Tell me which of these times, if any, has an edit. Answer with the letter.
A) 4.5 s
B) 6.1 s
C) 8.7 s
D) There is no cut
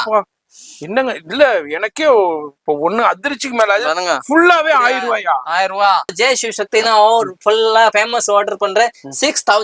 B